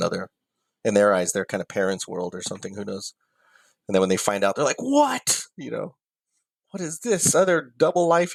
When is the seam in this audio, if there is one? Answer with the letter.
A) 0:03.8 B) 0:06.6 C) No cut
C